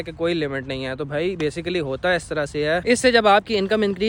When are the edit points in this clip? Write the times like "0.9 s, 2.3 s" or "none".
2.8 s